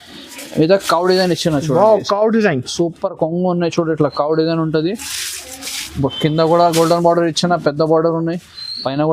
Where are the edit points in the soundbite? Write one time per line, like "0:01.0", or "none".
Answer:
none